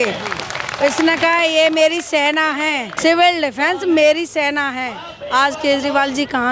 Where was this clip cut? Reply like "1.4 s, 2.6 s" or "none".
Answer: 2.9 s